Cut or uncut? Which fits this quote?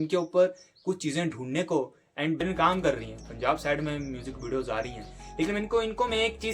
cut